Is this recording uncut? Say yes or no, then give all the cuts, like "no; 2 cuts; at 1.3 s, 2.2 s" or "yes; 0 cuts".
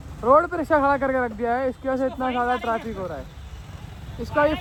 yes; 0 cuts